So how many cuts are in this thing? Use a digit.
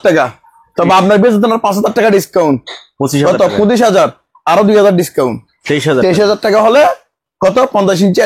0